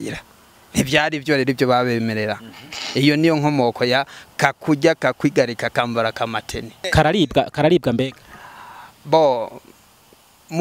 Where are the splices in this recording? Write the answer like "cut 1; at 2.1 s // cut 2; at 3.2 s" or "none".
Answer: cut 1; at 6.9 s